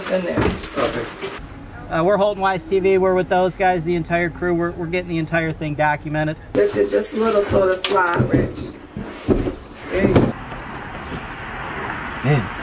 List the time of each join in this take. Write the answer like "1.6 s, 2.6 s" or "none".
1.3 s, 6.5 s, 10.3 s